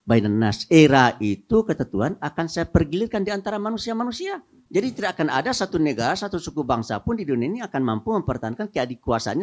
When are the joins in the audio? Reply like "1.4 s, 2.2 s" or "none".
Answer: 4.5 s